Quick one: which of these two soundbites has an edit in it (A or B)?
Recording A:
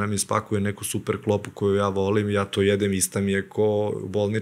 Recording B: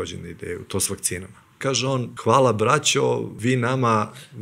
B